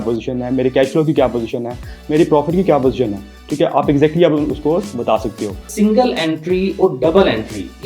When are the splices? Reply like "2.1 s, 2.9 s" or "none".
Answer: 5.7 s